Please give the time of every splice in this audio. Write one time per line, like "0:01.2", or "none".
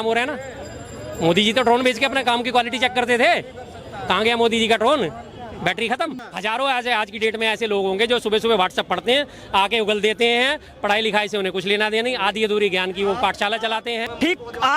0:06.2
0:14.0